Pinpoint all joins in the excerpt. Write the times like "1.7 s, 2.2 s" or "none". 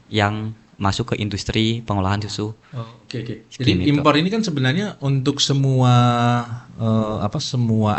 none